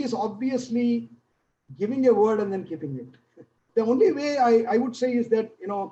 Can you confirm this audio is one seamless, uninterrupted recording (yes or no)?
no